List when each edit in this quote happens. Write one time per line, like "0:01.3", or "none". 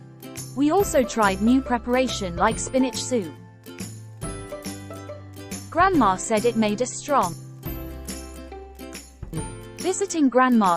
0:03.5
0:05.7
0:07.4
0:09.3